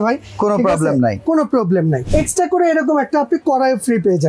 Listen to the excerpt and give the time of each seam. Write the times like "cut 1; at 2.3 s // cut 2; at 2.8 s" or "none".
cut 1; at 2.0 s